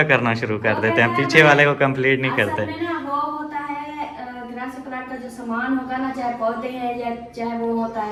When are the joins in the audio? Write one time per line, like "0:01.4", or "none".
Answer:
none